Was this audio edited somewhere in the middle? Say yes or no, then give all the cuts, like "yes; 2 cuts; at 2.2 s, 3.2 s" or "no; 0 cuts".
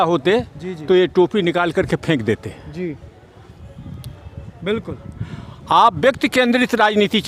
no; 0 cuts